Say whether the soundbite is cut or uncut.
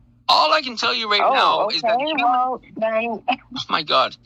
uncut